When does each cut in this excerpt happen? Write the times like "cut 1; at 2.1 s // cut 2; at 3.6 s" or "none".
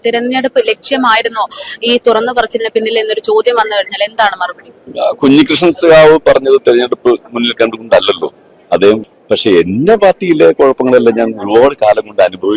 cut 1; at 9.1 s

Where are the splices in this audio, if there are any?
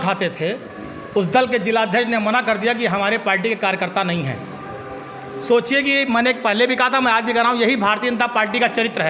none

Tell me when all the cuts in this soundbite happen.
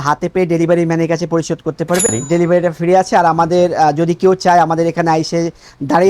cut 1; at 2.1 s

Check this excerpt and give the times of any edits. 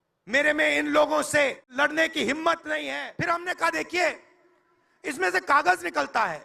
cut 1; at 1.7 s // cut 2; at 3.0 s

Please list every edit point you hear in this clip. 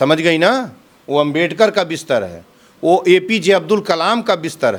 none

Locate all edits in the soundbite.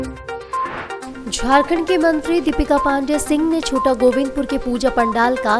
none

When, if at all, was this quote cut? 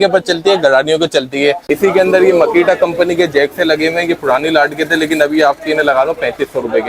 cut 1; at 1.6 s

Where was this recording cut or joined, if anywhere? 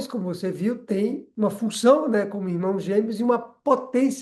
cut 1; at 1.3 s

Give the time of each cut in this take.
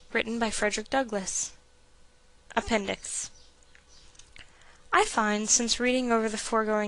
cut 1; at 5.6 s

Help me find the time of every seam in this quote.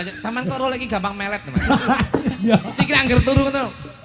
none

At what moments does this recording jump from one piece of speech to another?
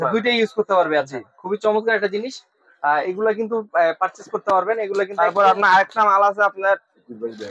none

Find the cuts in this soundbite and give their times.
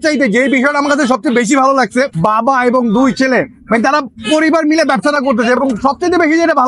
none

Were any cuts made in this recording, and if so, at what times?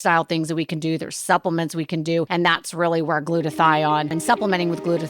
cut 1; at 2.3 s // cut 2; at 4.2 s

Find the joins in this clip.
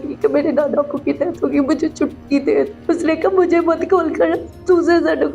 cut 1; at 2.8 s

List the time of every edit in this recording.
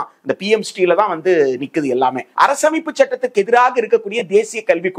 cut 1; at 2.2 s

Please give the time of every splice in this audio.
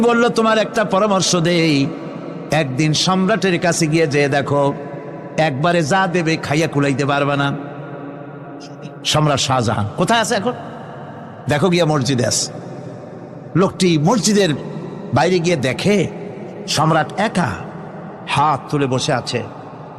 none

